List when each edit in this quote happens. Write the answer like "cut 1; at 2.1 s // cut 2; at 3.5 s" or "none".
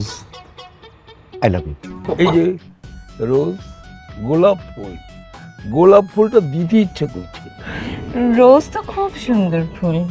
cut 1; at 2.2 s

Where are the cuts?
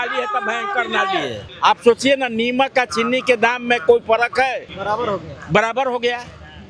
cut 1; at 1.4 s // cut 2; at 4.7 s

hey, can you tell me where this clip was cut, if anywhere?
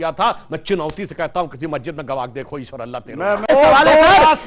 cut 1; at 3.5 s

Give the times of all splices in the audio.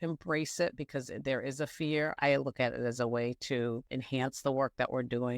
cut 1; at 2.2 s // cut 2; at 3.9 s

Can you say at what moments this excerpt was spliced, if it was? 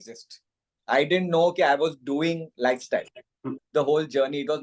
cut 1; at 3.5 s

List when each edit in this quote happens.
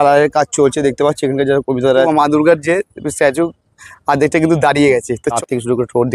cut 1; at 2.1 s // cut 2; at 5.4 s

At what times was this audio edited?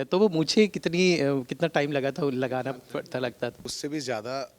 cut 1; at 3.7 s

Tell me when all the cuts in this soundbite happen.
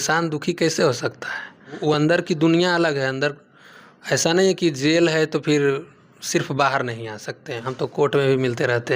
cut 1; at 1.7 s // cut 2; at 7.7 s

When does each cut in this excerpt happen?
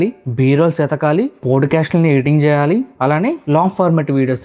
none

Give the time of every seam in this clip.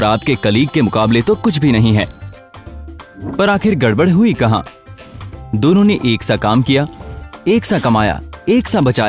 none

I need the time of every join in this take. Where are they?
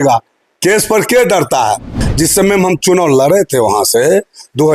cut 1; at 2.0 s

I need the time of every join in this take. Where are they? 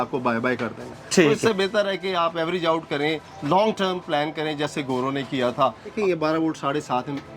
cut 1; at 5.9 s

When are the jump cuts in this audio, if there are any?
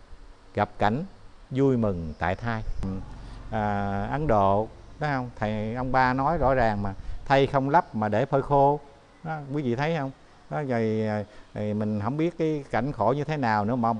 cut 1; at 3.0 s

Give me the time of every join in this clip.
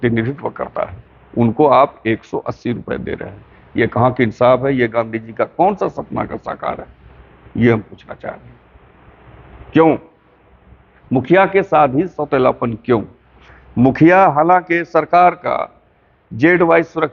none

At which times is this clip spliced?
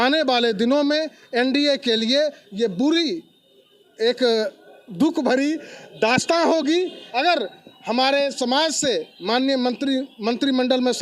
cut 1; at 7.0 s

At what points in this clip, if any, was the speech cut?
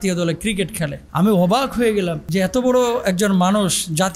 cut 1; at 1.0 s // cut 2; at 2.2 s

